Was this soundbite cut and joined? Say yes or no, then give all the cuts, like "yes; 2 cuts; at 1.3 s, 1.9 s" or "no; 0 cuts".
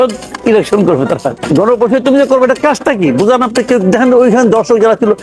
yes; 1 cut; at 1.4 s